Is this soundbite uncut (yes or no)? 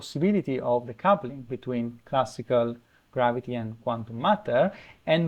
yes